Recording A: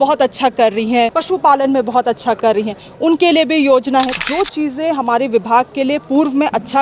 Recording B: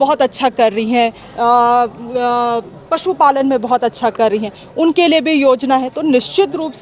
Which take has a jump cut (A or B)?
A